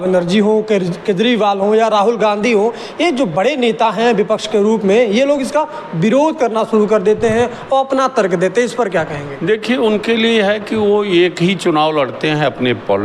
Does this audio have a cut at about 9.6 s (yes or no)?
no